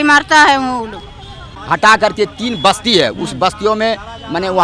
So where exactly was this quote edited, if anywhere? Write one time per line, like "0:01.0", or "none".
0:01.6